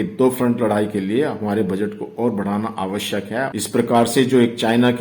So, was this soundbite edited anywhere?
no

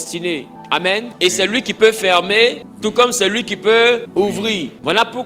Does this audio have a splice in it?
yes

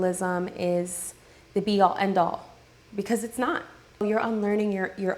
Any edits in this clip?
yes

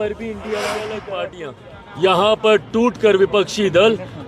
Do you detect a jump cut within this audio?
yes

